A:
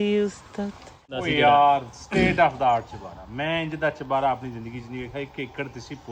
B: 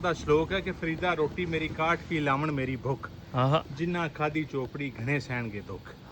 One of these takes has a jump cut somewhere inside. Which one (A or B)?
A